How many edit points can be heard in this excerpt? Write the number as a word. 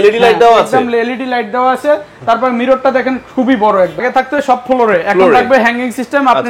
one